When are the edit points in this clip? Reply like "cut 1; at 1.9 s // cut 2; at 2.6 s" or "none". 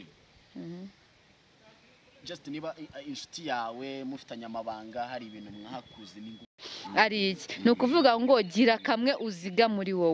cut 1; at 6.7 s